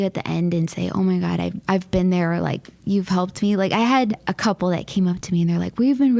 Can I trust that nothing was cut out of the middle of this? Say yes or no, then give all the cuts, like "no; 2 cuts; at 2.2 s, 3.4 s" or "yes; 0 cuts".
no; 2 cuts; at 1.6 s, 4.3 s